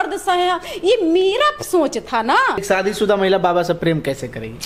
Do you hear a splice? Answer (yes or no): yes